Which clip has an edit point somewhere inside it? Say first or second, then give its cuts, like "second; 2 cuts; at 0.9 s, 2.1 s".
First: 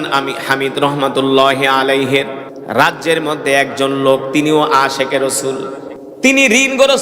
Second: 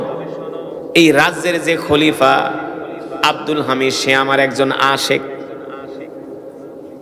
first; 2 cuts; at 2.5 s, 5.9 s